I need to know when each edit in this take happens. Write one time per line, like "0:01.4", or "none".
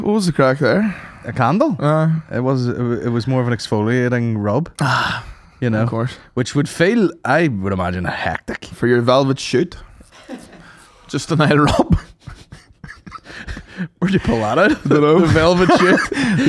none